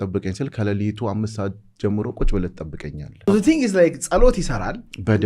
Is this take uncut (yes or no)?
no